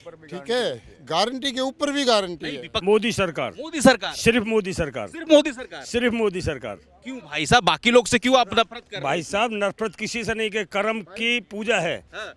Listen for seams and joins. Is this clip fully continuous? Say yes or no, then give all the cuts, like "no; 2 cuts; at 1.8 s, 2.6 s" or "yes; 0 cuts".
no; 1 cut; at 2.8 s